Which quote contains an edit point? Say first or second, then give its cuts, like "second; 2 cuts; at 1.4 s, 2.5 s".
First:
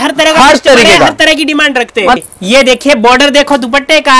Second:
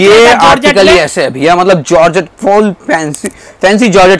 first; 1 cut; at 2.2 s